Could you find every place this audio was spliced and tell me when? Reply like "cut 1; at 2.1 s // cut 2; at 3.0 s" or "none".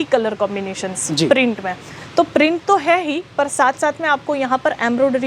none